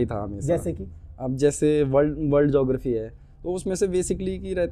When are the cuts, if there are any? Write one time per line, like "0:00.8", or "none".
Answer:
none